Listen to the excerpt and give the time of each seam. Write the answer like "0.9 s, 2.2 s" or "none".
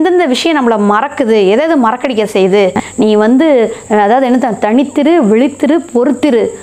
2.8 s